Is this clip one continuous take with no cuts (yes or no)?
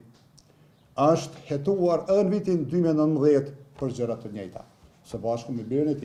yes